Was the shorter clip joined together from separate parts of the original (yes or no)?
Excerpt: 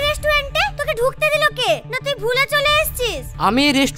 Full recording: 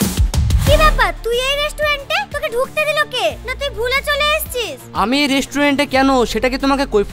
no